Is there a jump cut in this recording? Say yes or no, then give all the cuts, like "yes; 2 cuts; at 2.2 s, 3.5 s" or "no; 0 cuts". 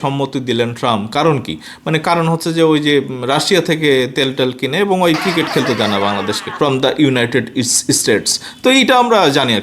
yes; 1 cut; at 6.4 s